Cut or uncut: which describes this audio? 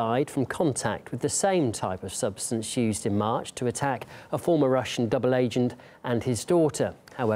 uncut